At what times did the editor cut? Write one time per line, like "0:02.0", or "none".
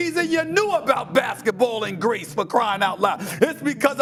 none